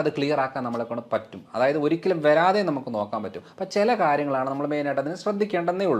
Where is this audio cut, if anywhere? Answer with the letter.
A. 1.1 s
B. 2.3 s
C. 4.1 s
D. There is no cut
D